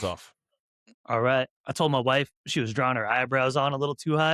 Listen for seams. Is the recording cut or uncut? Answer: cut